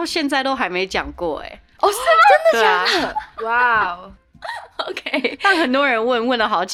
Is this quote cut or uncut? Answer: uncut